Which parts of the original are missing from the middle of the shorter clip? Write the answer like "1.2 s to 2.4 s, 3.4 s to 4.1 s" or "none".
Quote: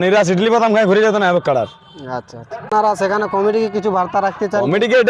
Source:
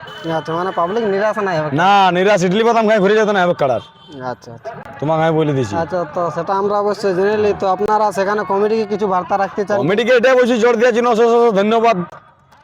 4.8 s to 7.9 s